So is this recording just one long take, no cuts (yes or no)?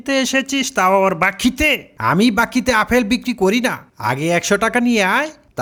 yes